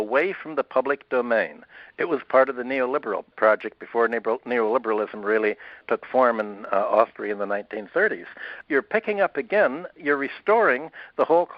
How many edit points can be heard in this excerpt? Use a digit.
4